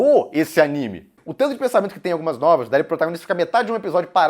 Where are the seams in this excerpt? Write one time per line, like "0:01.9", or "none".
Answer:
0:01.2